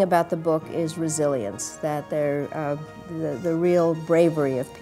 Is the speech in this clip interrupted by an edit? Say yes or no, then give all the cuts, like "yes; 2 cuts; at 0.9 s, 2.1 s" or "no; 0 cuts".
no; 0 cuts